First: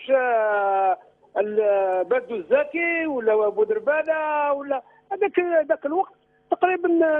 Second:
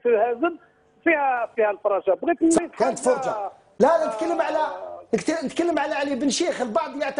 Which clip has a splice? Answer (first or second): first